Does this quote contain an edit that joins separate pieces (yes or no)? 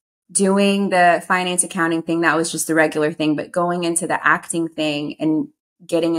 no